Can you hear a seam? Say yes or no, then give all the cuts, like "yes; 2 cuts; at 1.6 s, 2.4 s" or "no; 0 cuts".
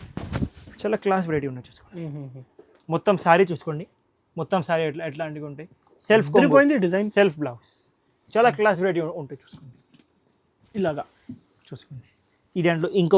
no; 0 cuts